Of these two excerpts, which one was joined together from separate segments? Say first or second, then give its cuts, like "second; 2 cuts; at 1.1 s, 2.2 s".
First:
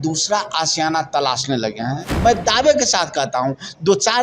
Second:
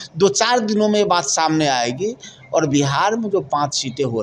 first; 1 cut; at 2.2 s